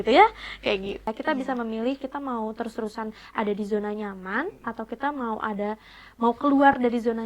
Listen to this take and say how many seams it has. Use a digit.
1